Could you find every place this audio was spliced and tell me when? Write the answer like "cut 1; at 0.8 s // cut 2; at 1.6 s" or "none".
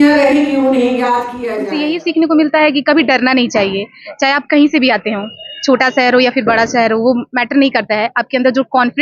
cut 1; at 1.4 s